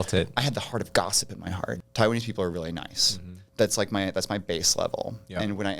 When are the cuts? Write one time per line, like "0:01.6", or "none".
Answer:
0:01.8